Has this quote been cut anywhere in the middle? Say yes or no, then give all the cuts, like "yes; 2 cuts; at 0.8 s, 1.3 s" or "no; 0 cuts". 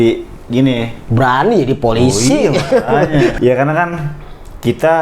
yes; 1 cut; at 3.4 s